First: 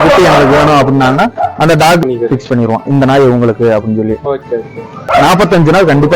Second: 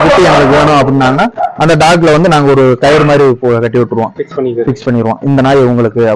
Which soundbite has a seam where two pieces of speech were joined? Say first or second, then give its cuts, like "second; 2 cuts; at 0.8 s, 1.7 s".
first; 2 cuts; at 2.0 s, 5.0 s